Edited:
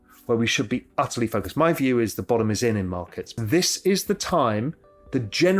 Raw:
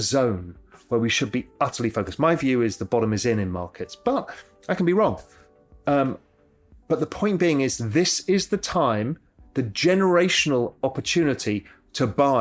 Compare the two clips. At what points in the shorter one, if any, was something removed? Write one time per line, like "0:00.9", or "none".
0:03.3